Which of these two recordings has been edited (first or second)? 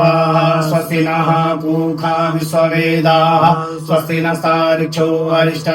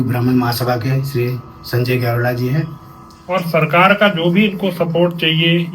second